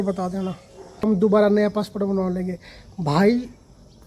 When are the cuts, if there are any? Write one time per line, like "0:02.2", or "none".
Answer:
0:01.0